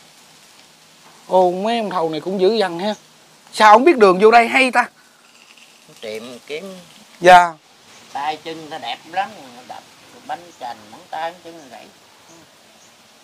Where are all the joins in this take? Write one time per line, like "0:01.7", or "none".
0:07.5